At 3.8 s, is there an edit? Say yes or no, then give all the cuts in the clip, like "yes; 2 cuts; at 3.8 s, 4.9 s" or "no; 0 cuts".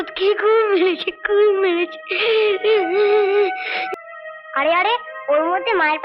yes; 1 cut; at 3.8 s